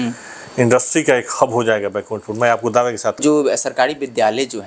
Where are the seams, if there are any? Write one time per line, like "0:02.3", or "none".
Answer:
0:03.2